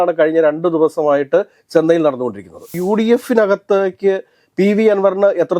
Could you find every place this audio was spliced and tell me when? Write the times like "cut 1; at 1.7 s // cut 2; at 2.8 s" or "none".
cut 1; at 2.7 s

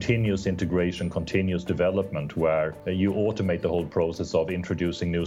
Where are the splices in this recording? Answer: cut 1; at 2.8 s

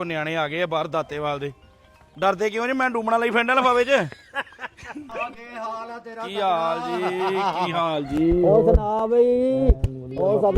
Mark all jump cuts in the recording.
cut 1; at 5.2 s

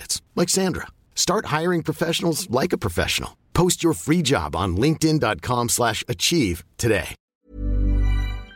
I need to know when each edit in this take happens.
cut 1; at 7.3 s

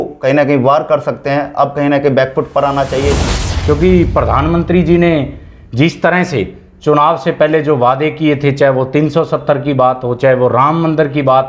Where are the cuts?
cut 1; at 3.2 s

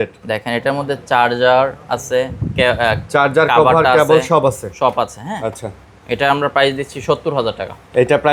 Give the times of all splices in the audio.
none

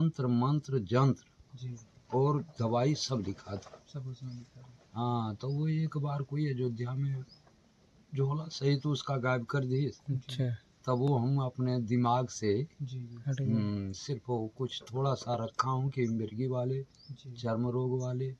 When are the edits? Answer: none

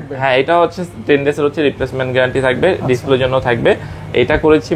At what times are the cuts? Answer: none

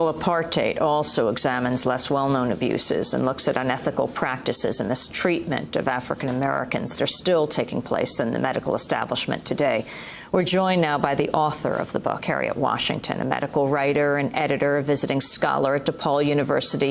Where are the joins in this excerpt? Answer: cut 1; at 6.9 s

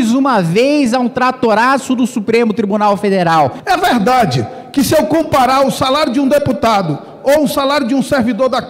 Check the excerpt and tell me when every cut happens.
cut 1; at 3.6 s

